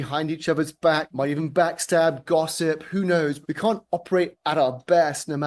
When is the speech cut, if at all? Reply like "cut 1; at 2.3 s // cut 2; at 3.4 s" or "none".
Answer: cut 1; at 1.1 s // cut 2; at 3.4 s // cut 3; at 4.3 s